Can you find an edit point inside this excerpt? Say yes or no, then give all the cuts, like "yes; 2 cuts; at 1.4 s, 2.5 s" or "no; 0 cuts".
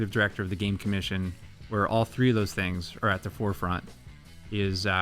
no; 0 cuts